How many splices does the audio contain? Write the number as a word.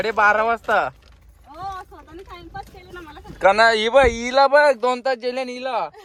zero